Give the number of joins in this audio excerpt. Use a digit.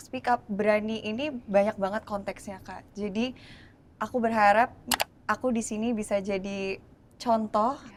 0